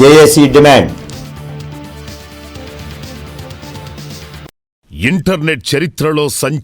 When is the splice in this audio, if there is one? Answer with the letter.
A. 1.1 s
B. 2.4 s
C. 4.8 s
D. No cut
C